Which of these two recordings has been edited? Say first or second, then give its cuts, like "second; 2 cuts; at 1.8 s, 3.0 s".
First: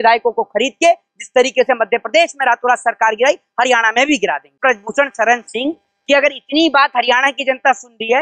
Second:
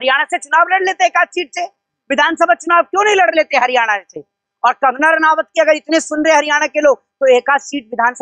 first; 1 cut; at 4.6 s